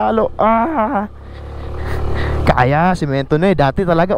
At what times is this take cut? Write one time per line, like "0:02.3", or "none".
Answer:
none